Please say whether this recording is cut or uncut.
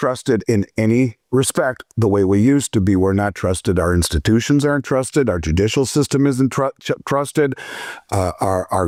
uncut